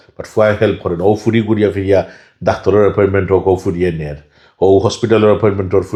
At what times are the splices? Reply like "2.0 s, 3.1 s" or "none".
none